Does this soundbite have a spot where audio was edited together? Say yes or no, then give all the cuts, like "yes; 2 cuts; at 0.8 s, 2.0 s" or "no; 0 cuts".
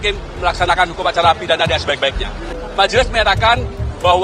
yes; 1 cut; at 2.6 s